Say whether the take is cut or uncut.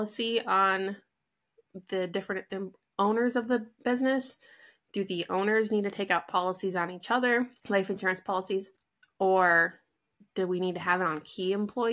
cut